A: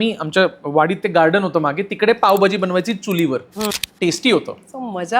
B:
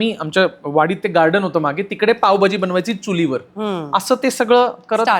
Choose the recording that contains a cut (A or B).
A